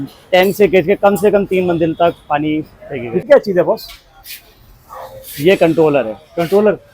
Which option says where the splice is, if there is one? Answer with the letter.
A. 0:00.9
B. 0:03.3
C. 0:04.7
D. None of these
B